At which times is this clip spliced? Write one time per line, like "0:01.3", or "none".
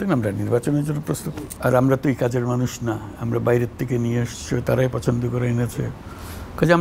0:01.1